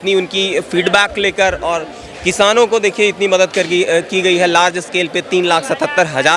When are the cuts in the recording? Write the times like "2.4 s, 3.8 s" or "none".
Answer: none